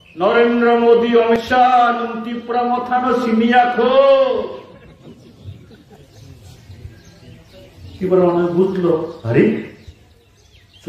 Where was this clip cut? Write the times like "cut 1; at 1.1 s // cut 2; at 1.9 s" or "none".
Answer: cut 1; at 1.4 s